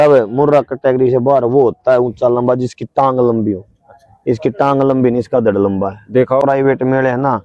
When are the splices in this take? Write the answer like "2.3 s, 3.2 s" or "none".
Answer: 6.4 s